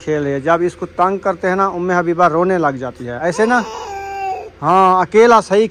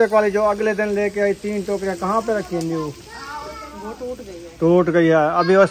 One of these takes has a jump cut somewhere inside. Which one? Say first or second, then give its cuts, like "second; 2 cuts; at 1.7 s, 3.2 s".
first; 1 cut; at 3.1 s